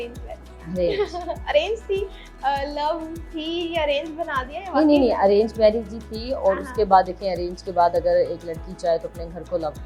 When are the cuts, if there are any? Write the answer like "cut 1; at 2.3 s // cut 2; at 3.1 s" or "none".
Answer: none